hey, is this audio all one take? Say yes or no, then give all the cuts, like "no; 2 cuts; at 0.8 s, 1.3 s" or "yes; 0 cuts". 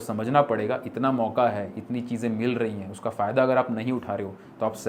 yes; 0 cuts